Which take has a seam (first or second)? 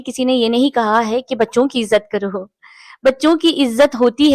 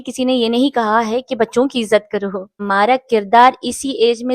second